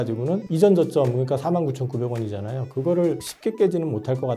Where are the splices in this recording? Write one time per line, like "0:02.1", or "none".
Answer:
0:03.3